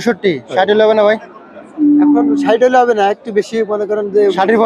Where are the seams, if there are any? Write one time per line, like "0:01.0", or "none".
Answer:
none